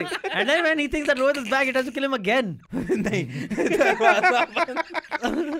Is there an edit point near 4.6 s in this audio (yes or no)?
no